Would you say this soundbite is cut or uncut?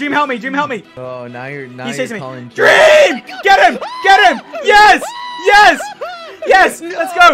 cut